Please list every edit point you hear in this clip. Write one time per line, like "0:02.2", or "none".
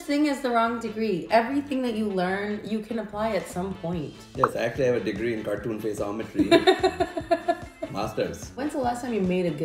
0:04.2
0:08.5